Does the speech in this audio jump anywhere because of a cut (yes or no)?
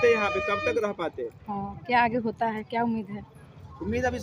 no